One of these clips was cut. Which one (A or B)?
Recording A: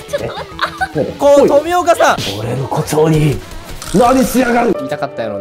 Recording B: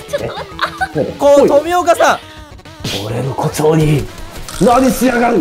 A